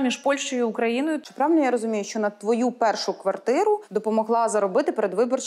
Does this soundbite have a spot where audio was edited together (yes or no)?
yes